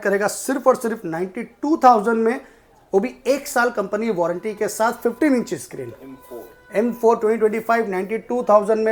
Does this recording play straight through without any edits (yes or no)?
yes